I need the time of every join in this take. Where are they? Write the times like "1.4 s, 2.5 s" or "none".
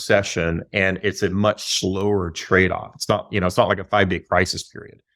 none